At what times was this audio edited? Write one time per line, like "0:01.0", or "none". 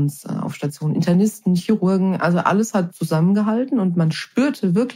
none

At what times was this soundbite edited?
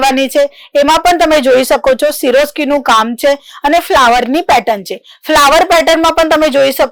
none

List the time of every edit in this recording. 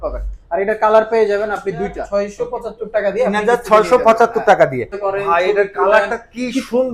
0:02.0
0:05.0

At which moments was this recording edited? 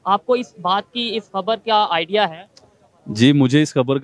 none

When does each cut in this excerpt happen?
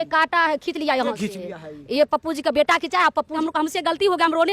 0:03.4

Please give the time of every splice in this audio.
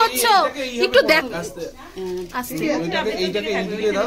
0:01.2

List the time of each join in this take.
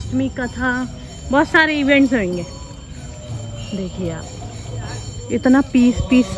none

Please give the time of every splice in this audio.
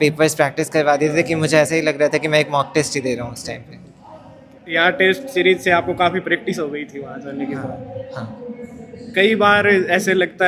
none

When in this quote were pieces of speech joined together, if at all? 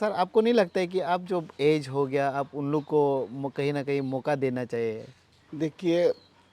none

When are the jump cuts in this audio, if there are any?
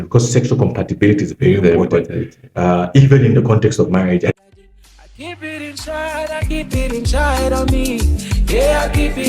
0:04.3

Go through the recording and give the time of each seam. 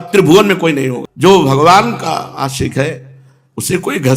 0:00.9

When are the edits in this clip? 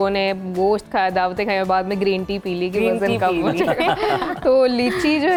none

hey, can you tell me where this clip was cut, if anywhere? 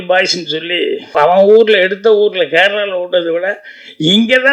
0:01.1

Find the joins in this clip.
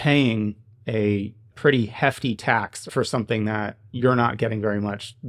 0:02.8

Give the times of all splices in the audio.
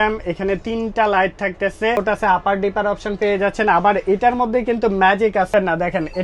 0:02.0
0:05.5

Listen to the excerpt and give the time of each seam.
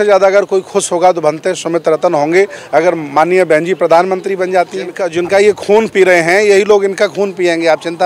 0:05.0

